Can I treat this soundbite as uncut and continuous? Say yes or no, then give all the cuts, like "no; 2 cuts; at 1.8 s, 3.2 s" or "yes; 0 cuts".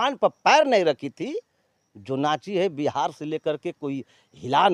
yes; 0 cuts